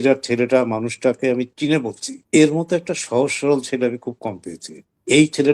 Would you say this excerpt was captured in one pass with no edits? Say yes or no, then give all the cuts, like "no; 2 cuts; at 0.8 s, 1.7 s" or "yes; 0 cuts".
yes; 0 cuts